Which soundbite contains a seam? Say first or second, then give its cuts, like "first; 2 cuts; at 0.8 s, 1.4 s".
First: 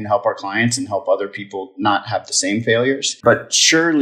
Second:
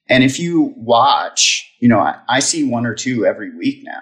first; 1 cut; at 3.1 s